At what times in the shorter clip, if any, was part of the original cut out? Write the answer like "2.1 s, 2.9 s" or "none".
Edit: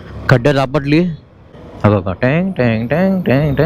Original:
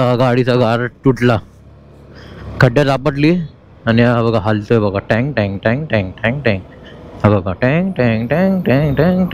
1.3 s